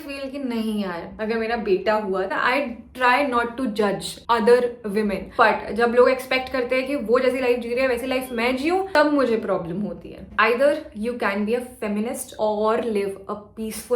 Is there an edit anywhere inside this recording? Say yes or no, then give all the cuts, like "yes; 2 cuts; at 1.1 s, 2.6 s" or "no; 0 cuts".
yes; 2 cuts; at 2.3 s, 10.2 s